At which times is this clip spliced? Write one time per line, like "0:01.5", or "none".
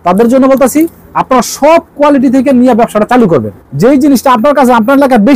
0:03.6